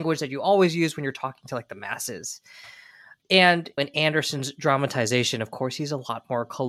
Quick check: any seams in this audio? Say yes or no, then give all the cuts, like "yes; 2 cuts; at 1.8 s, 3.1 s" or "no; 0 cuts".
no; 0 cuts